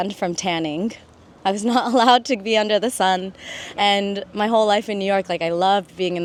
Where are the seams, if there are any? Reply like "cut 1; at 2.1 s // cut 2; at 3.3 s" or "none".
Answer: none